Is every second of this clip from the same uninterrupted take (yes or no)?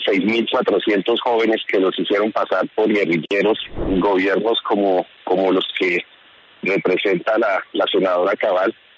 no